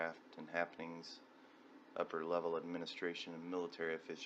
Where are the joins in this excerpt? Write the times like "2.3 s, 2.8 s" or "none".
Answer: 1.7 s